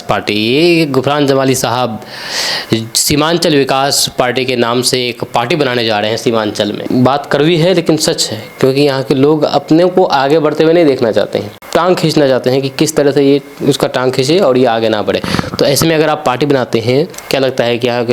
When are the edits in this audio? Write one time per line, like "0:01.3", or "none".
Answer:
0:06.8
0:11.6
0:17.2

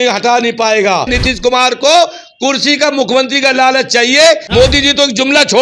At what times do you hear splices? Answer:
0:01.1
0:04.4

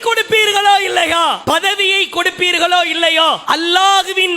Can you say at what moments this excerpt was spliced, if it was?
0:01.4
0:03.4

